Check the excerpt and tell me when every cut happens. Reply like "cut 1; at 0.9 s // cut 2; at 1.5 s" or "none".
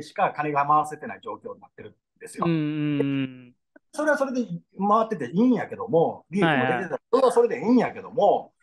none